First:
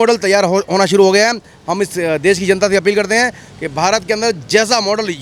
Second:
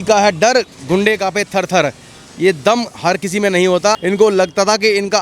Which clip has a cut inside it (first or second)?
second